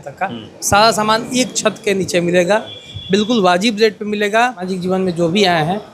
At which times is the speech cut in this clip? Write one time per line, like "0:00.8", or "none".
0:04.7